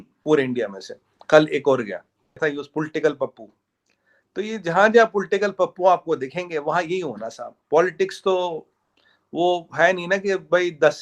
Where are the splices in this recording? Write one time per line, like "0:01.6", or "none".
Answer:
0:02.4